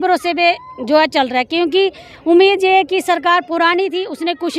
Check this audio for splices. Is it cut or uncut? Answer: uncut